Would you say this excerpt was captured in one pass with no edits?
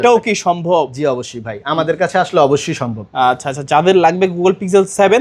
yes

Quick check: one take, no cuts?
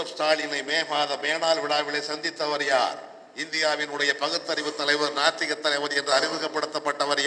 yes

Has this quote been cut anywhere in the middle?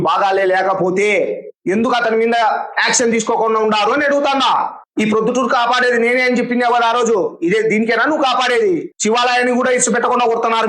yes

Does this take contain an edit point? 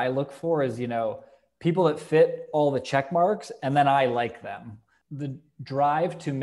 yes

